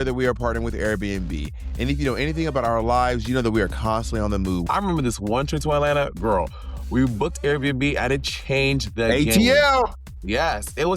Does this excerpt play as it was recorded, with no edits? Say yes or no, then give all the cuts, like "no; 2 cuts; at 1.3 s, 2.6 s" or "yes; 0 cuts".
no; 1 cut; at 4.6 s